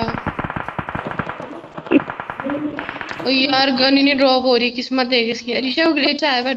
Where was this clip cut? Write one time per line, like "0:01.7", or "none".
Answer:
none